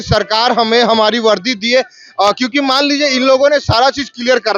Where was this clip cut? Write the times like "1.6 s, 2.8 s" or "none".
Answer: none